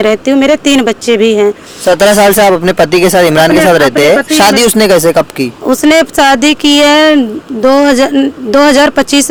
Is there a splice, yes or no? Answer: no